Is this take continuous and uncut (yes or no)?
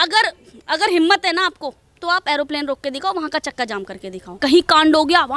no